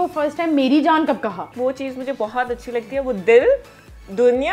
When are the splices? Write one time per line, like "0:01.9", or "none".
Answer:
0:01.5